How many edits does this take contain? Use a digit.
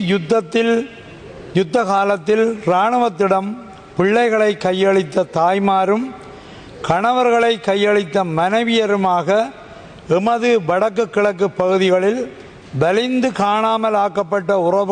0